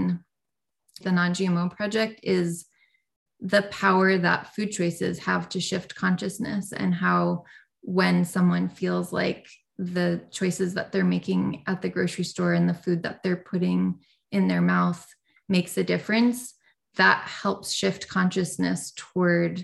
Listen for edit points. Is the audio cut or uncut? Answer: cut